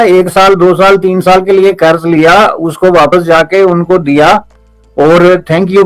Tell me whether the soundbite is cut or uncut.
uncut